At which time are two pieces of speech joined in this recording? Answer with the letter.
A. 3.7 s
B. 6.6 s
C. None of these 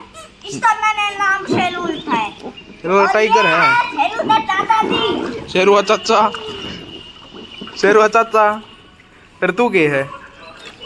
B